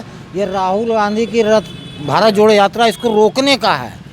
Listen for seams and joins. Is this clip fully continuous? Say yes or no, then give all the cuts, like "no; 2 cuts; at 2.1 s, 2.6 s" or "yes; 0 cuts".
yes; 0 cuts